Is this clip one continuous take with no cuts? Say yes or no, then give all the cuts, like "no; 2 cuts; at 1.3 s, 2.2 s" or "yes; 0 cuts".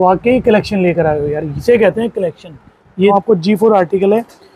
no; 1 cut; at 3.1 s